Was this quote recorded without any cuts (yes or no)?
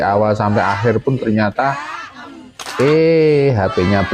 yes